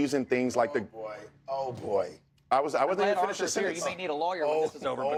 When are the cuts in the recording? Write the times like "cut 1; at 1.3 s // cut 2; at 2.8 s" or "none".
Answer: none